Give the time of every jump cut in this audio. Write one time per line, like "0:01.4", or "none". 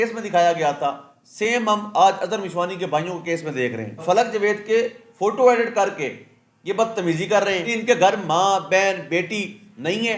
0:04.0
0:07.7